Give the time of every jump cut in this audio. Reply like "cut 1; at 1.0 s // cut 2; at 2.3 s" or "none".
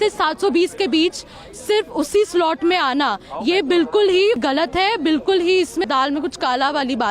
cut 1; at 4.4 s // cut 2; at 5.9 s